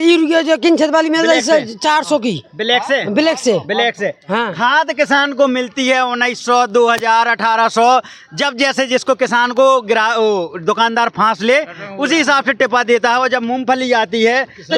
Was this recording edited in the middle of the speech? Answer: no; 0 cuts

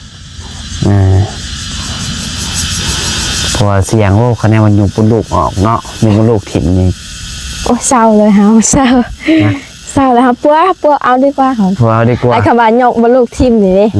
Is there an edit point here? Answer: no; 0 cuts

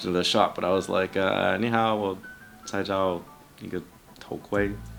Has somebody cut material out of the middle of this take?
no; 0 cuts

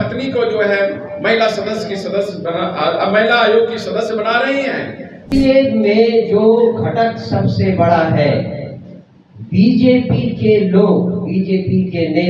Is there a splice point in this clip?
yes; 1 cut; at 5.3 s

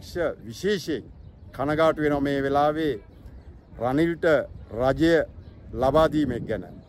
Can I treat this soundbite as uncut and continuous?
yes; 0 cuts

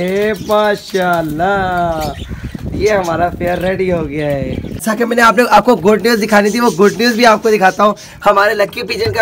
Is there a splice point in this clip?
no; 0 cuts

